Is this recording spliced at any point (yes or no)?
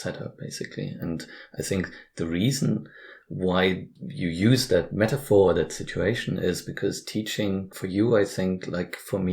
yes